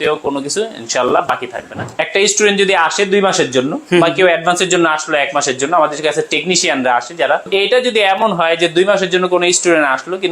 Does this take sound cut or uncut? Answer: cut